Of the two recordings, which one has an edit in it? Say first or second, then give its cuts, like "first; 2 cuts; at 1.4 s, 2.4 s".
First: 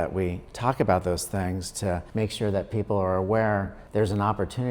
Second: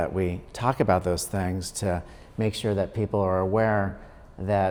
first; 2 cuts; at 2.1 s, 3.8 s